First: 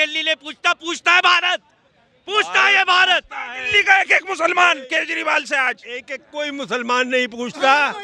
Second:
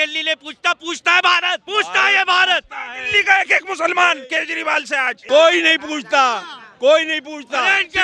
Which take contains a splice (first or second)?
second